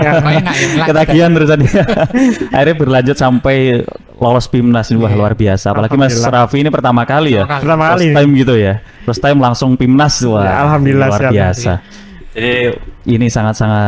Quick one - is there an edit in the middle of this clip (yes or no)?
no